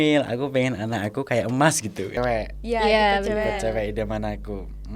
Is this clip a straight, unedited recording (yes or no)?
no